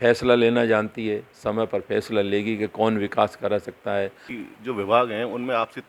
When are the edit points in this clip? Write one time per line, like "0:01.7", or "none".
0:04.3